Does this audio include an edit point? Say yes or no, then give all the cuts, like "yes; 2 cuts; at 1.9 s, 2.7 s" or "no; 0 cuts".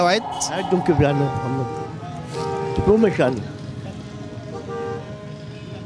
no; 0 cuts